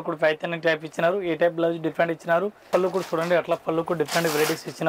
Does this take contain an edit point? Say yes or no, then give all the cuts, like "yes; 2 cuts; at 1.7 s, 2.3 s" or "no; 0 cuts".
yes; 1 cut; at 2.7 s